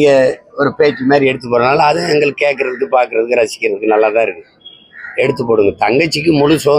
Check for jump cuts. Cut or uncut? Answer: uncut